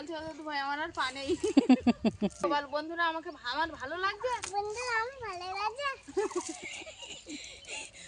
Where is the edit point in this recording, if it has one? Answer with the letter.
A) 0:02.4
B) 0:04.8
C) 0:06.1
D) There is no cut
A